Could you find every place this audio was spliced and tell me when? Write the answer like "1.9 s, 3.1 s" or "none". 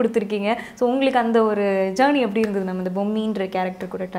none